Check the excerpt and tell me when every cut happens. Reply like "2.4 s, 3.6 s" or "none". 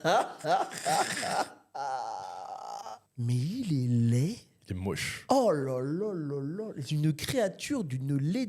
3.0 s